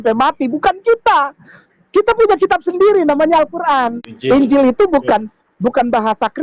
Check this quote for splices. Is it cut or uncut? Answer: cut